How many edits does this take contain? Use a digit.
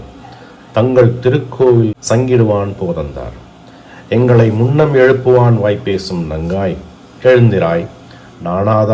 1